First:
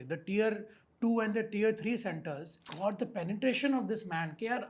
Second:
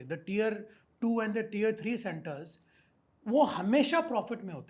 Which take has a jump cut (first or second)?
first